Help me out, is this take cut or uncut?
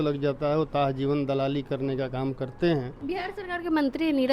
cut